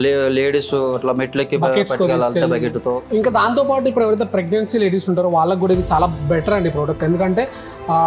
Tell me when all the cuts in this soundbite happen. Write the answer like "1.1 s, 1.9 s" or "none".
3.0 s